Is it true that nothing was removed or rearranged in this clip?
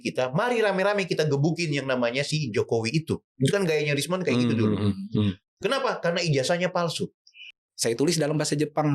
no; 1 cut; at 7.5 s

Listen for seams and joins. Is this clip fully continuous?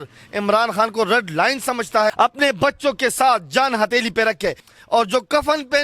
no; 2 cuts; at 2.1 s, 4.6 s

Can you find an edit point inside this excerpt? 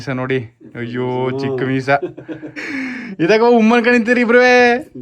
yes; 1 cut; at 2.7 s

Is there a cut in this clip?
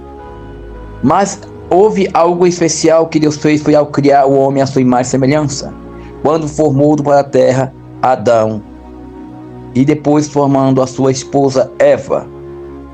yes; 1 cut; at 1.0 s

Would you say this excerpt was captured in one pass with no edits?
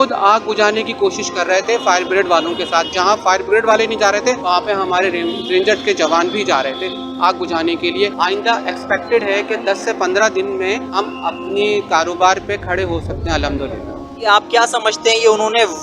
no; 2 cuts; at 8.1 s, 14.0 s

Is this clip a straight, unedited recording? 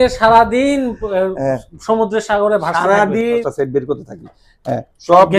no; 1 cut; at 3.4 s

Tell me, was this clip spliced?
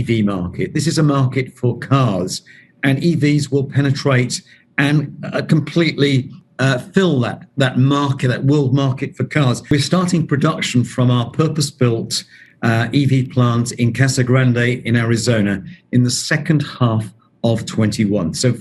yes; 1 cut; at 9.7 s

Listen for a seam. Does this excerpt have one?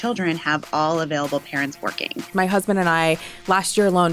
yes; 1 cut; at 2.3 s

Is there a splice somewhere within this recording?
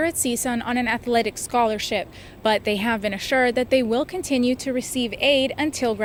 no; 0 cuts

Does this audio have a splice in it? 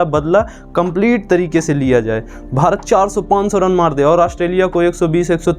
no; 0 cuts

